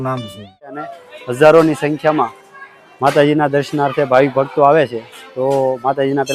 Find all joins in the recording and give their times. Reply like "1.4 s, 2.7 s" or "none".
0.9 s